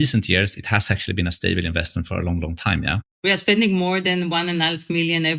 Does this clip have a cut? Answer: yes; 2 cuts; at 2.1 s, 3.0 s

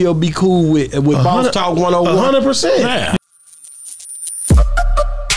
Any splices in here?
yes; 1 cut; at 3.2 s

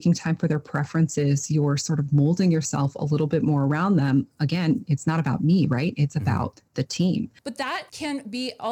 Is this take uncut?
no; 1 cut; at 7.4 s

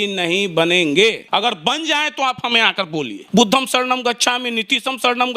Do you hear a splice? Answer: yes; 2 cuts; at 1.2 s, 3.2 s

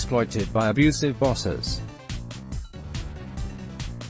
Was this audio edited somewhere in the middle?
yes; 1 cut; at 1.6 s

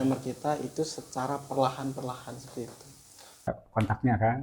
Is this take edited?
yes; 1 cut; at 3.5 s

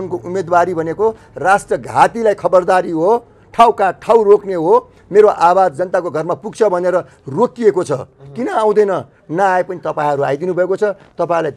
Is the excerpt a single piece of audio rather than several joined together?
yes; 0 cuts

